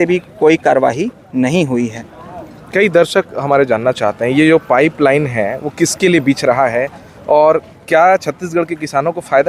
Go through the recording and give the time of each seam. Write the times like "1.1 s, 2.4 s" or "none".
none